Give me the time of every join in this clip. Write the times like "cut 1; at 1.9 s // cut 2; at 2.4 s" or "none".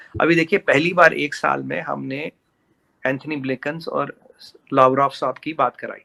none